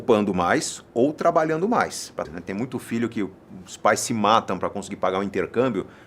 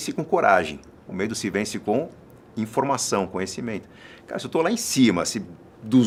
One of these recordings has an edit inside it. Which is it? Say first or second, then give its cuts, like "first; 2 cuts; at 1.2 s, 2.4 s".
first; 1 cut; at 2.3 s